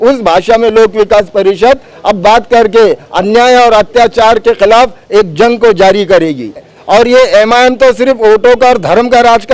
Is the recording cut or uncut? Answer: cut